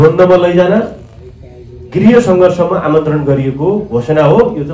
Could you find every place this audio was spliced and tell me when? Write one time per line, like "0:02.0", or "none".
none